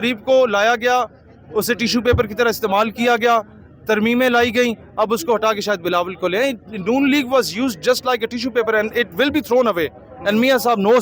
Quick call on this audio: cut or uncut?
uncut